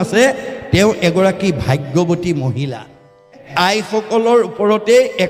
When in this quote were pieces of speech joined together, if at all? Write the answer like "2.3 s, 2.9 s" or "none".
3.4 s